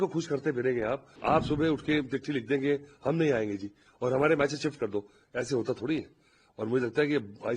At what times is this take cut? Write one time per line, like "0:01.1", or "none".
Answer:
0:01.1

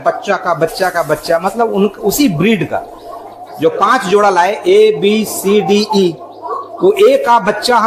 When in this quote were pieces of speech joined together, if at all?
none

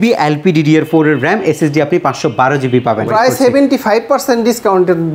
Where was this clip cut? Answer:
0:03.1

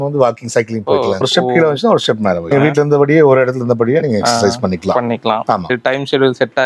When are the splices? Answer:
none

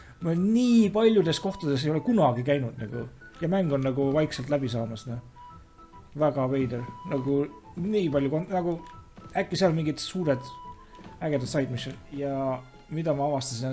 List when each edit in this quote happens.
0:12.1

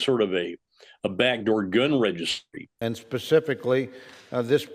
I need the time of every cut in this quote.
none

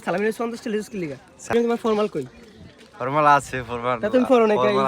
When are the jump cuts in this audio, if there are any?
0:01.5

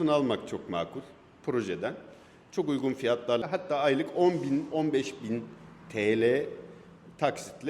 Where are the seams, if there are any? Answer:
0:03.4

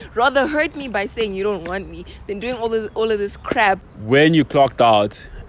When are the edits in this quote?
0:03.9

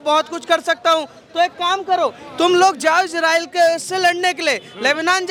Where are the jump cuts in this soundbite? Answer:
none

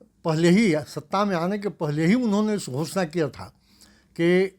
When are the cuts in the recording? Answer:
none

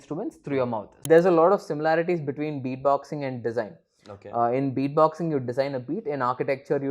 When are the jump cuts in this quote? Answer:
0:00.9

